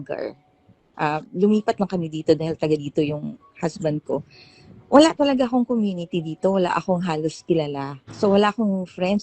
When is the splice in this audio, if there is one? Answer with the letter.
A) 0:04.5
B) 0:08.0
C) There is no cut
B